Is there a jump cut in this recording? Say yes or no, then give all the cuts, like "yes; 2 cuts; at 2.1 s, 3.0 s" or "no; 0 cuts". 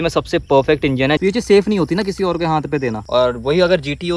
yes; 2 cuts; at 1.2 s, 3.0 s